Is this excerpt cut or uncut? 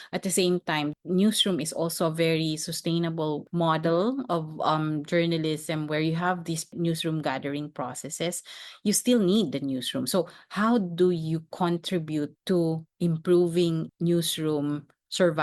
cut